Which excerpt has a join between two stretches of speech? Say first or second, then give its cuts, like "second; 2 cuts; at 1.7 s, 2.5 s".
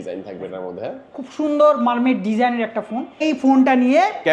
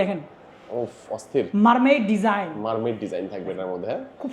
first; 1 cut; at 3.2 s